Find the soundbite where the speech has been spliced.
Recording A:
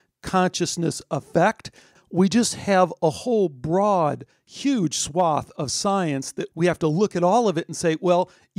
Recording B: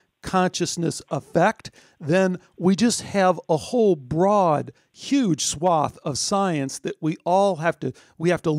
A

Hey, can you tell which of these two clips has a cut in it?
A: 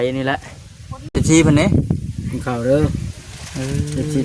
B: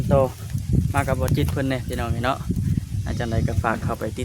A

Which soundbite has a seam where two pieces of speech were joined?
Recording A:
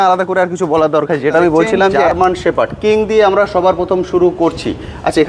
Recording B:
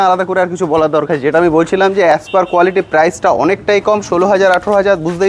A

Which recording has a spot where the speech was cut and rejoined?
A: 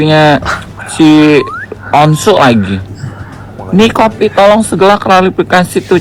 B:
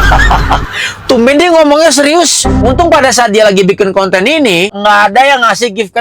B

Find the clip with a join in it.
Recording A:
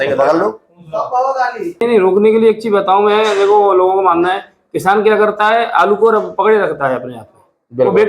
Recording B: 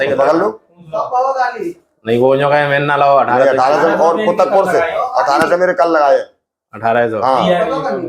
A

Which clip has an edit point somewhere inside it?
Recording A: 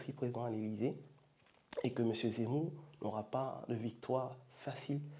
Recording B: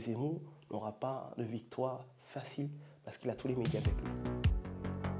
B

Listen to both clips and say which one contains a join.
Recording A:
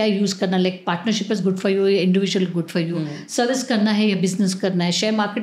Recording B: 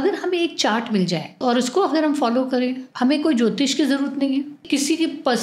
B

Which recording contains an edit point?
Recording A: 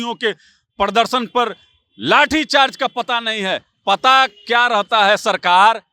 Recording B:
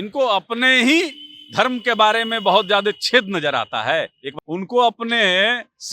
B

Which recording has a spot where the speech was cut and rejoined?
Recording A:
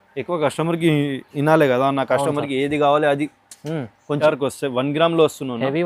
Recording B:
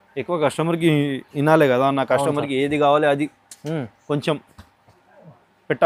A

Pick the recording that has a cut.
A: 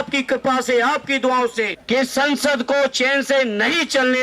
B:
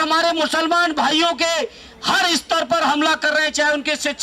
A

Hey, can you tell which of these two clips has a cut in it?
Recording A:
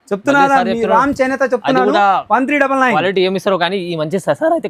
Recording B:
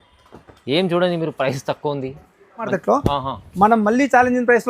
B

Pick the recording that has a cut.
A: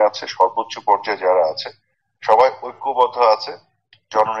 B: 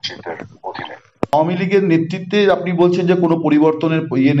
B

